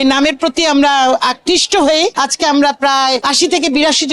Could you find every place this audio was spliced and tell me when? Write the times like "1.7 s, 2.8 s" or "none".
none